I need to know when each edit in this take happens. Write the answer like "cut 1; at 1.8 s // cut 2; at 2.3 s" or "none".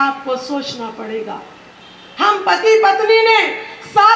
none